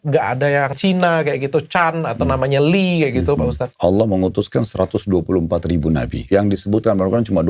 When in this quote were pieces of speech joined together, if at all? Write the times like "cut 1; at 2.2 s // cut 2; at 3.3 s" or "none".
cut 1; at 0.8 s // cut 2; at 3.6 s // cut 3; at 6.2 s